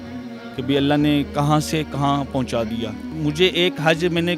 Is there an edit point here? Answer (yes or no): yes